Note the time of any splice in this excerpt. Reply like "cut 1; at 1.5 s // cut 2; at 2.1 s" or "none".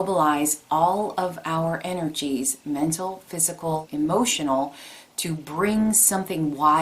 cut 1; at 3.9 s